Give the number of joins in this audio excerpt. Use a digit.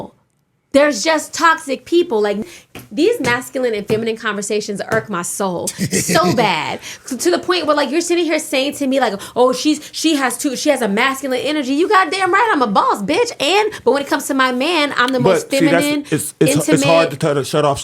1